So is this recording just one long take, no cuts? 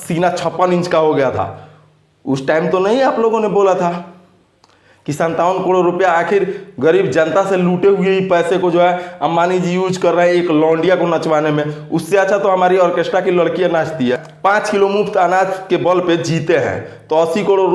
no; 1 cut; at 14.3 s

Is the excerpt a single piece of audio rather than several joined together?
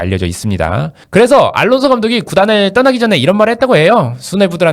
no; 1 cut; at 1.0 s

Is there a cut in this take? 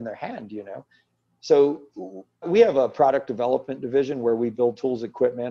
yes; 1 cut; at 2.5 s

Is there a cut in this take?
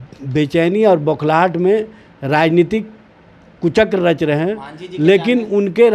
no; 0 cuts

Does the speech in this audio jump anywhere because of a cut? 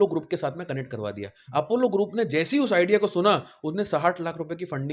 no; 0 cuts

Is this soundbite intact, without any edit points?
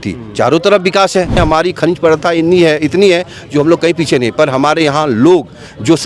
no; 1 cut; at 1.4 s

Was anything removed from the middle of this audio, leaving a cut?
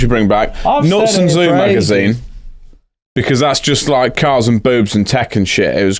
no; 0 cuts

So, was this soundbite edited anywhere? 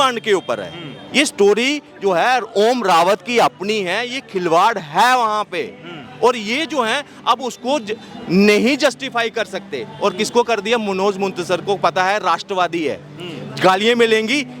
no; 0 cuts

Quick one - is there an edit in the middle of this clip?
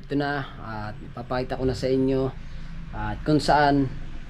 no; 0 cuts

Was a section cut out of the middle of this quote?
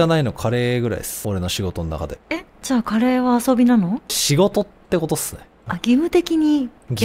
yes; 3 cuts; at 1.1 s, 2.2 s, 4.2 s

